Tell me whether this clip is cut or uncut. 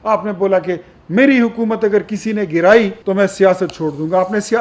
cut